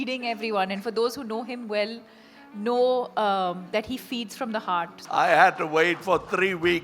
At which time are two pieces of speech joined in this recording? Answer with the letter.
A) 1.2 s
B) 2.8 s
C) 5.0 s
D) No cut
C